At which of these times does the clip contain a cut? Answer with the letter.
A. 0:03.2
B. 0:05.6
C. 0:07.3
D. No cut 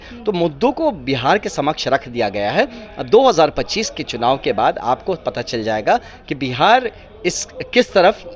D